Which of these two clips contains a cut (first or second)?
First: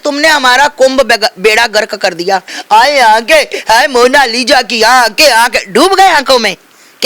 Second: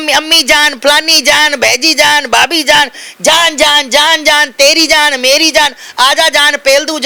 first